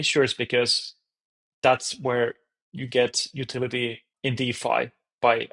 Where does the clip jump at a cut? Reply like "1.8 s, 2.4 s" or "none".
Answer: 4.1 s